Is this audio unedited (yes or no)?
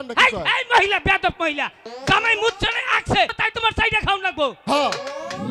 no